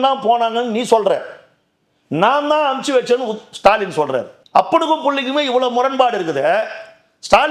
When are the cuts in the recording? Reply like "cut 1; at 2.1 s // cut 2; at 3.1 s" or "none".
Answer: none